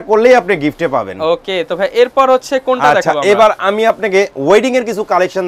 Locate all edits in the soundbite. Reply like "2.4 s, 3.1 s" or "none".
none